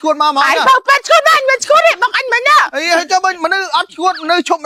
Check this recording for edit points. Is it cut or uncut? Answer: uncut